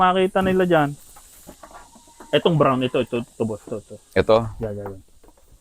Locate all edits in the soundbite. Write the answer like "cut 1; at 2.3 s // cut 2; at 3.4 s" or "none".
cut 1; at 1.0 s